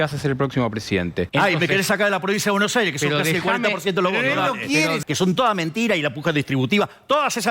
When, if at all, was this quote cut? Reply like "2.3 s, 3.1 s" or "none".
1.3 s, 5.0 s